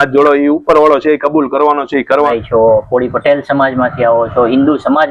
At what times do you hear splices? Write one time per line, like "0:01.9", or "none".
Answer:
0:02.3